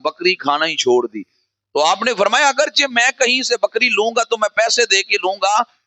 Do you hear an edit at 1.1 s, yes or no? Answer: no